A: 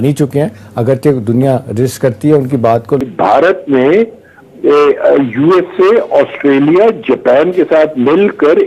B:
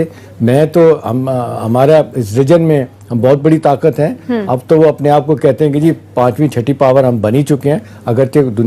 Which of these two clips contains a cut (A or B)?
A